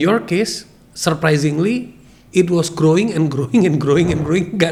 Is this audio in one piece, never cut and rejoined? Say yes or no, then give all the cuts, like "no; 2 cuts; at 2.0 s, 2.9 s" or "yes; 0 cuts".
yes; 0 cuts